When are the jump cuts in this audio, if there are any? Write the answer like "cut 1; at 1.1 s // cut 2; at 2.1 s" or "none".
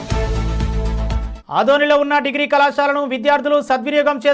cut 1; at 1.3 s